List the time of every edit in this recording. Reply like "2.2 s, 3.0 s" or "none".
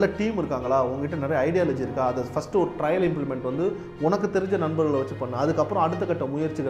none